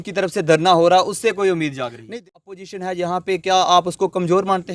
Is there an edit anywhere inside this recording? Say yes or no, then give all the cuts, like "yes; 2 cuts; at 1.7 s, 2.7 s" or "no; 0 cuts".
yes; 1 cut; at 2.0 s